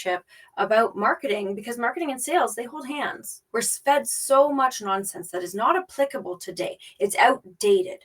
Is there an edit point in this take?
yes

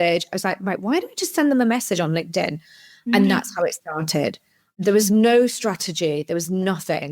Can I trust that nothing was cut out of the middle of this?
yes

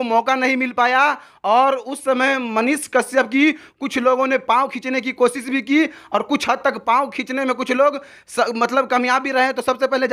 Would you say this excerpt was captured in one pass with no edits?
yes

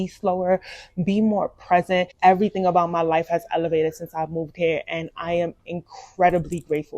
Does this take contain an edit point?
yes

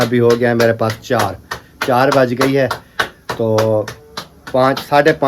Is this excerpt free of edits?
yes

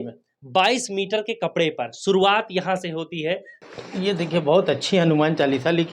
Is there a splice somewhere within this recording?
yes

